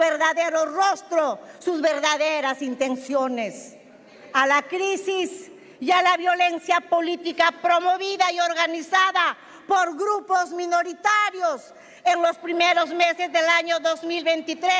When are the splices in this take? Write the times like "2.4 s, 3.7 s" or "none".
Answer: none